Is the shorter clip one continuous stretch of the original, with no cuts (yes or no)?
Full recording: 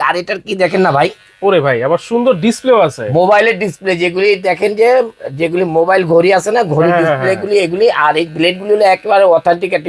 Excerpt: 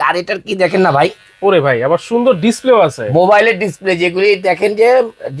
yes